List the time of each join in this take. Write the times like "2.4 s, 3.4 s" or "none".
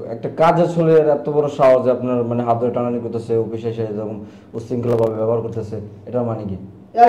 none